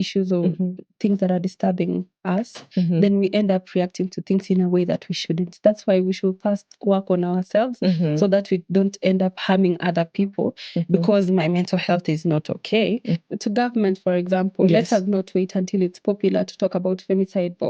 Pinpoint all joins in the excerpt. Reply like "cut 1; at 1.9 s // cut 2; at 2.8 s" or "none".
cut 1; at 13.2 s